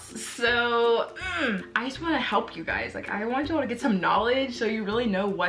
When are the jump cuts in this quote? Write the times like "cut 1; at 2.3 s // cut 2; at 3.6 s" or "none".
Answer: cut 1; at 1.7 s